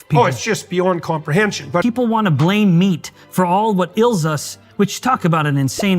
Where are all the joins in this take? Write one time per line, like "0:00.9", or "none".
0:01.8